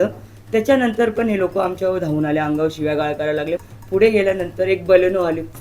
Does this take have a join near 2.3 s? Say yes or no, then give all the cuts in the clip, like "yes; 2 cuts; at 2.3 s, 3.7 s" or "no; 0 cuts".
no; 1 cut; at 3.6 s